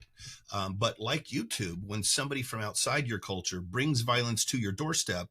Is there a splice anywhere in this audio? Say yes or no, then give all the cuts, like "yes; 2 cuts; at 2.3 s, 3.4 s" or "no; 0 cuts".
no; 0 cuts